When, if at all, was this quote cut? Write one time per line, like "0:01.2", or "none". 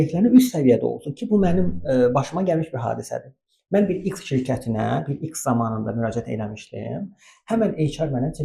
none